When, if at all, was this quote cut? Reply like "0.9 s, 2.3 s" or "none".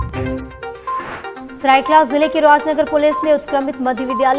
none